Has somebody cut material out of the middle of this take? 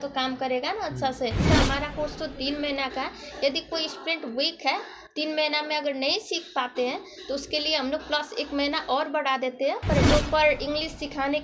yes; 2 cuts; at 1.5 s, 10.0 s

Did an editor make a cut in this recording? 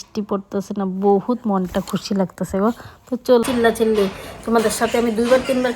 yes; 1 cut; at 3.4 s

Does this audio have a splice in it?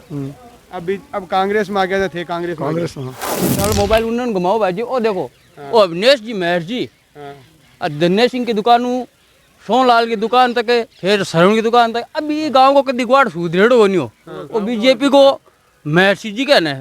yes; 1 cut; at 3.5 s

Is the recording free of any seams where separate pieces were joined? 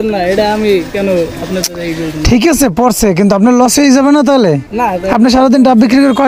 yes; 0 cuts

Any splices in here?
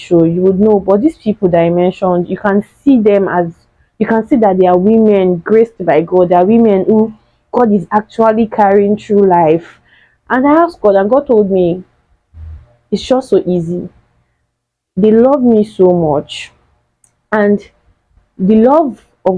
no; 0 cuts

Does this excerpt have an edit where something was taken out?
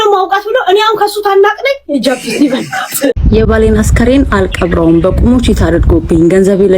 yes; 1 cut; at 3.2 s

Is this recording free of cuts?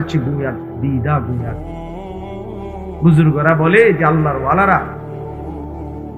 no; 2 cuts; at 1.6 s, 3.0 s

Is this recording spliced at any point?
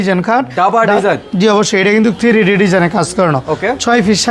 no; 0 cuts

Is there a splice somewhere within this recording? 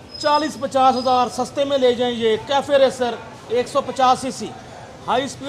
no; 0 cuts

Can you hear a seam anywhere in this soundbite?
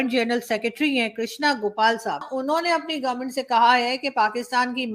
yes; 1 cut; at 2.3 s

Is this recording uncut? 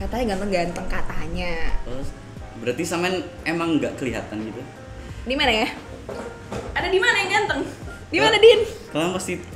yes; 0 cuts

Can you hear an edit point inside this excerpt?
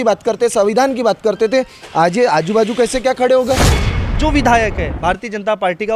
yes; 1 cut; at 4.0 s

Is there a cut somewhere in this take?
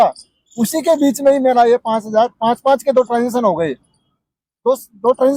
no; 0 cuts

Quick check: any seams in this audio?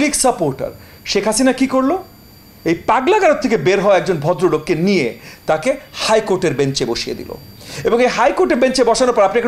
yes; 1 cut; at 7.5 s

